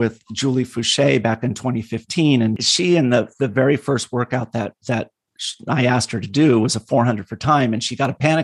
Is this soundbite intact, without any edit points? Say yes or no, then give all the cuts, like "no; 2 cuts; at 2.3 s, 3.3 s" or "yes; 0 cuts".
no; 1 cut; at 2.6 s